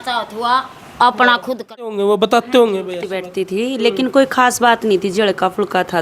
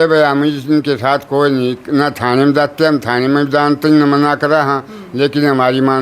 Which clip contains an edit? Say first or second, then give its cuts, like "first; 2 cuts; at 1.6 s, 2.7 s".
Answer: first; 1 cut; at 1.8 s